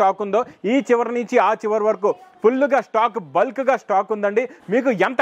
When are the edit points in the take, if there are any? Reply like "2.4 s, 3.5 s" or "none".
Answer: none